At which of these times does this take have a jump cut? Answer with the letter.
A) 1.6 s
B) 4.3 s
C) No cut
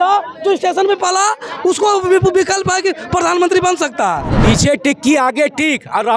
B